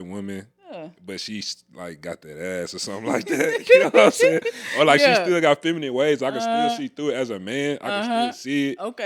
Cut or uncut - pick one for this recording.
uncut